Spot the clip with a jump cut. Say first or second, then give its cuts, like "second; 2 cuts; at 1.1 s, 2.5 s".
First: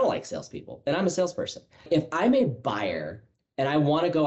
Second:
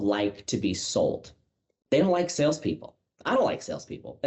first; 1 cut; at 1.8 s